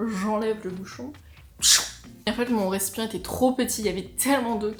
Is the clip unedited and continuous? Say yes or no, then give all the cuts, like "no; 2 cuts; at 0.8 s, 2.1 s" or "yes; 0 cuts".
yes; 0 cuts